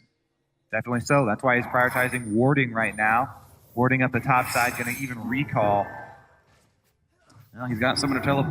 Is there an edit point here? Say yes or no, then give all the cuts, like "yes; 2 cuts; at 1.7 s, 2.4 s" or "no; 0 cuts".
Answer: yes; 1 cut; at 4.7 s